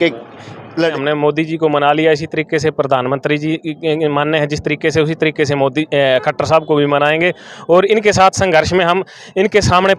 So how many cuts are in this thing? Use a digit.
1